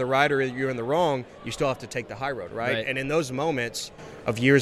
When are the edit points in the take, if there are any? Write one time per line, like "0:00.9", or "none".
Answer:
none